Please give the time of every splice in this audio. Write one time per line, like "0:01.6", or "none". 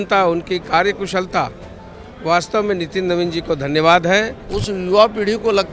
0:04.4